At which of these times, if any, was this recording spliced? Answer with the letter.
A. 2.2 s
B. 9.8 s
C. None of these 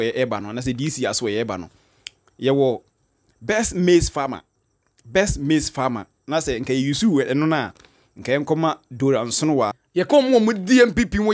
B